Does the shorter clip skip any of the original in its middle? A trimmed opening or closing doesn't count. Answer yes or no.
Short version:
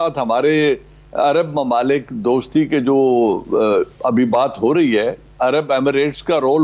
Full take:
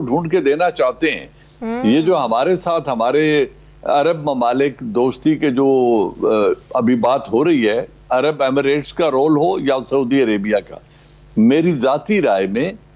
no